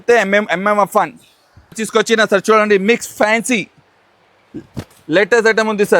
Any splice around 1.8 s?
yes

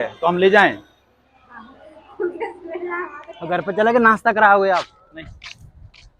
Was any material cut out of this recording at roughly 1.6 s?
no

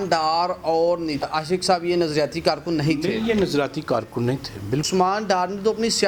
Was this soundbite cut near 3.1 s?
no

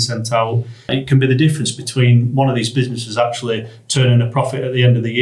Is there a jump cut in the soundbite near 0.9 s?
yes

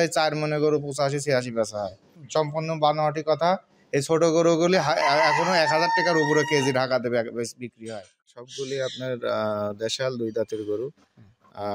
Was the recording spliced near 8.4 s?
yes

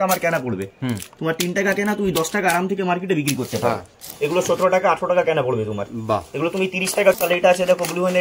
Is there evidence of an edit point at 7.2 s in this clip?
yes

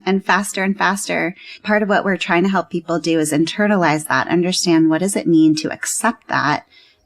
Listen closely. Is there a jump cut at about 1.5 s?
yes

